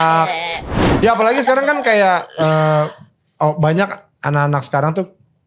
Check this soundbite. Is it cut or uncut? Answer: cut